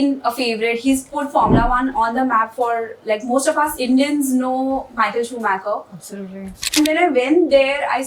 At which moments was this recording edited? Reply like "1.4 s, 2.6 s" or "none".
6.8 s